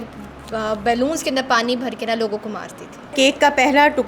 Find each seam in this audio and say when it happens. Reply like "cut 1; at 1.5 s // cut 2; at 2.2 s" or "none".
cut 1; at 3.1 s

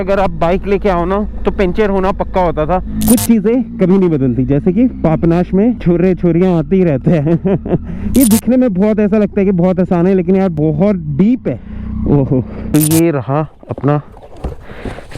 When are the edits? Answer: cut 1; at 2.9 s // cut 2; at 8.0 s // cut 3; at 11.7 s // cut 4; at 12.7 s

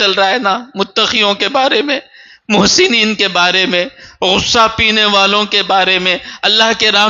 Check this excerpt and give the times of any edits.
none

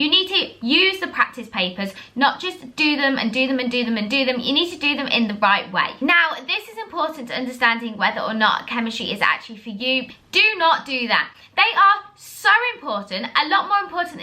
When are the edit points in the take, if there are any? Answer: cut 1; at 5.9 s // cut 2; at 10.1 s

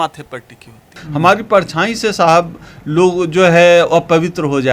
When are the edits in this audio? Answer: cut 1; at 1.0 s

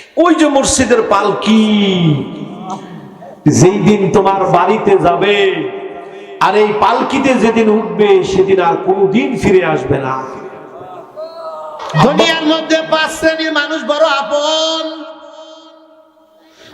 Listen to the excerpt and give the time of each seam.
cut 1; at 12.0 s

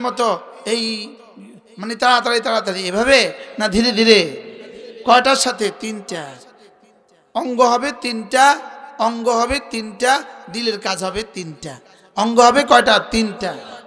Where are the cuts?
none

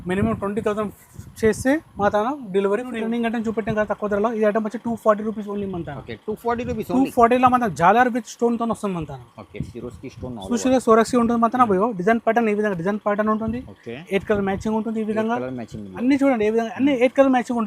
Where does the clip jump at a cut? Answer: cut 1; at 3.0 s

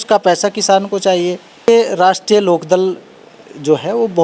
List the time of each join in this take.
cut 1; at 1.7 s

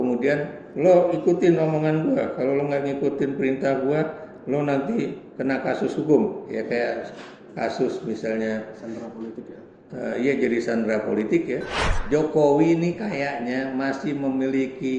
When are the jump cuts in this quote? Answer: cut 1; at 11.7 s

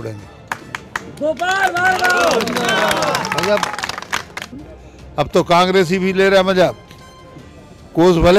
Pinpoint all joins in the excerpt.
cut 1; at 4.4 s

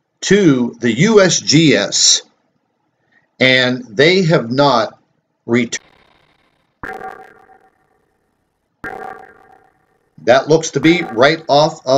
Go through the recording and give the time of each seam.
none

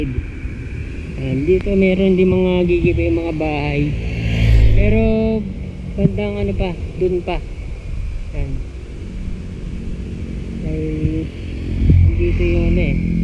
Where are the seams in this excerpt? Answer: none

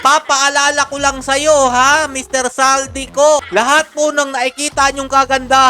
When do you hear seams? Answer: cut 1; at 3.4 s

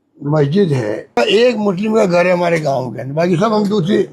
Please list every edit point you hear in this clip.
cut 1; at 1.2 s

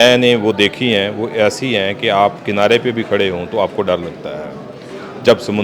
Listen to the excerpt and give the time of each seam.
none

